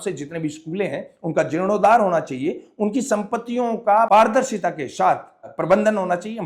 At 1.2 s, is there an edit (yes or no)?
no